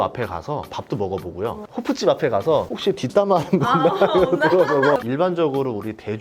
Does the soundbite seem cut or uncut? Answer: cut